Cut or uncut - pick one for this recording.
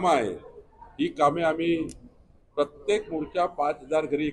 uncut